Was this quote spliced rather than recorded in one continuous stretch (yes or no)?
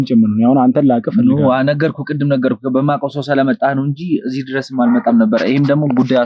no